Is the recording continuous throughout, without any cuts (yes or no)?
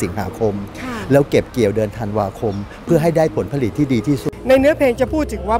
no